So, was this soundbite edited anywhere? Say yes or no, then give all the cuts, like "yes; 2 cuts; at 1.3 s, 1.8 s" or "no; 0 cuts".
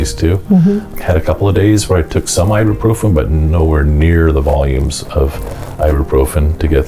yes; 1 cut; at 0.9 s